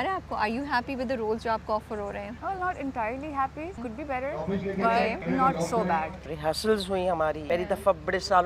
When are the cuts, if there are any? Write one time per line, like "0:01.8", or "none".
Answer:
0:02.3
0:03.8
0:05.2
0:06.3
0:07.4